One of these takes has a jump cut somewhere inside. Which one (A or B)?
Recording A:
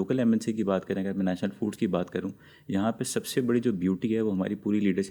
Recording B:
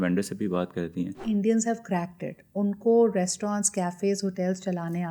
B